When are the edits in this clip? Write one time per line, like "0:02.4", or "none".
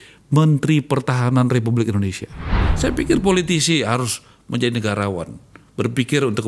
0:02.6